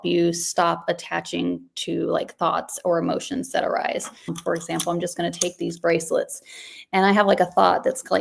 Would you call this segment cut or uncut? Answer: cut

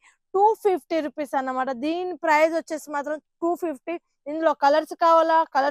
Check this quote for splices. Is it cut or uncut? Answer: uncut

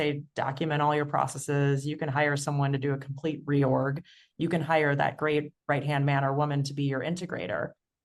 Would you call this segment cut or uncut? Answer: uncut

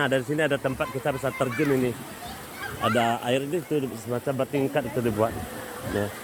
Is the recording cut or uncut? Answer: uncut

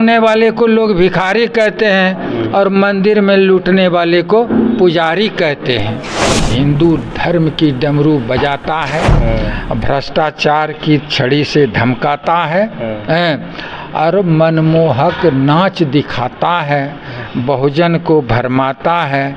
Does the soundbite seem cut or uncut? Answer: cut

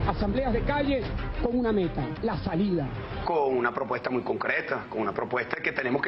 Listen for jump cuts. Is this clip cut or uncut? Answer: uncut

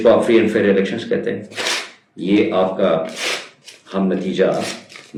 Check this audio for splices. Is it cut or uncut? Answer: uncut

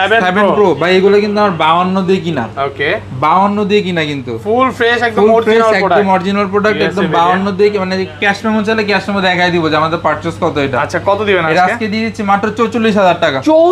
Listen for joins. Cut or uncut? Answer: uncut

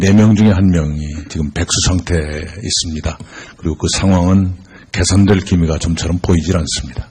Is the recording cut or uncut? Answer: cut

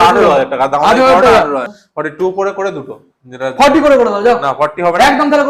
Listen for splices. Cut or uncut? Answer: cut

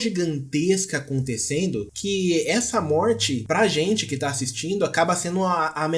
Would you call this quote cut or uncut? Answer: cut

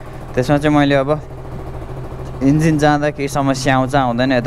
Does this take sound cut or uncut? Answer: uncut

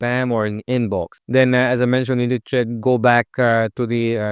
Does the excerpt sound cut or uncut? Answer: cut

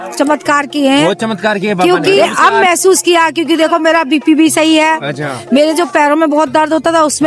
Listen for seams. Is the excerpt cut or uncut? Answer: cut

